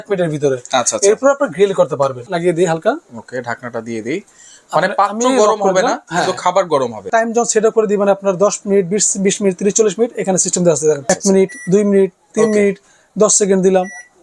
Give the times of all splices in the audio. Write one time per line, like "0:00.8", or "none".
0:02.3
0:07.1
0:11.0